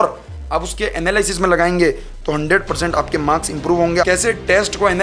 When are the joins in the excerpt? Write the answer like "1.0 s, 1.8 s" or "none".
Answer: 4.0 s